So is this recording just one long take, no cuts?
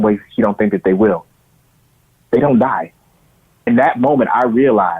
no; 1 cut; at 3.7 s

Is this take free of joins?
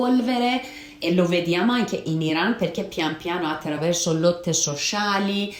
yes; 0 cuts

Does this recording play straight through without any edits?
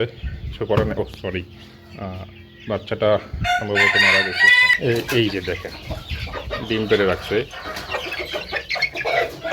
no; 1 cut; at 4.7 s

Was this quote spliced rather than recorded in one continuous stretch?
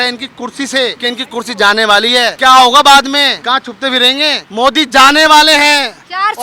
yes; 4 cuts; at 1.0 s, 2.4 s, 3.4 s, 4.4 s

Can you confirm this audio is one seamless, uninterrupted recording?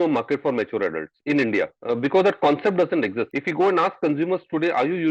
no; 2 cuts; at 1.8 s, 3.4 s

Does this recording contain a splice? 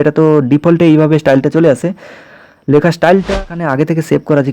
yes; 1 cut; at 3.4 s

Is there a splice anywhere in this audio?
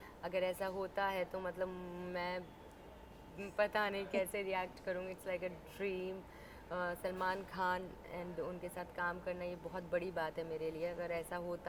no; 0 cuts

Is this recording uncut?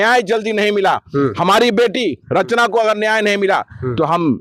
yes; 0 cuts

